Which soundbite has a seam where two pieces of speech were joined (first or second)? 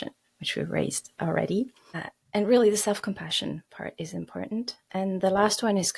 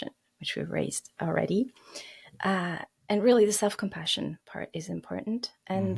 first